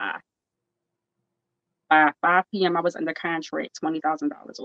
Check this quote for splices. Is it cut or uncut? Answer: uncut